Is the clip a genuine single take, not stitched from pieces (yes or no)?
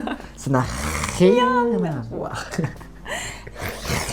yes